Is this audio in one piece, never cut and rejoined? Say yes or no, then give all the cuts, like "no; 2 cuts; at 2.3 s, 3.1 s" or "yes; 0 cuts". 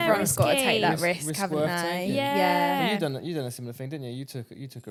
yes; 0 cuts